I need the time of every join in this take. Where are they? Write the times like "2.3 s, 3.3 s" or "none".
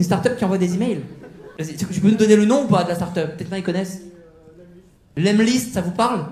none